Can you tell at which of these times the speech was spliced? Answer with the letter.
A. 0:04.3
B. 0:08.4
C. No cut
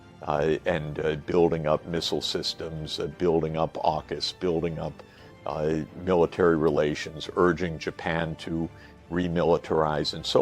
B